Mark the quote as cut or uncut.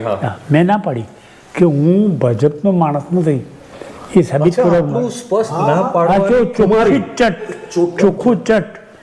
uncut